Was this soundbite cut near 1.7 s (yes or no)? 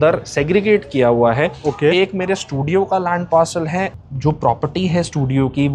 no